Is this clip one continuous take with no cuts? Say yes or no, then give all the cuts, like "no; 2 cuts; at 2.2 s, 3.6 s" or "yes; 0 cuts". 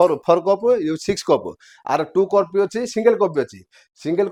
yes; 0 cuts